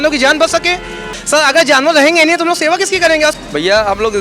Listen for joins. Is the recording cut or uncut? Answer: cut